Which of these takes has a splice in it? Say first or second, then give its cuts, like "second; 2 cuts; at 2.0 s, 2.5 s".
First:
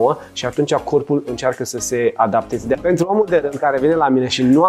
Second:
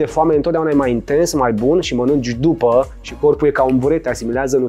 first; 1 cut; at 2.8 s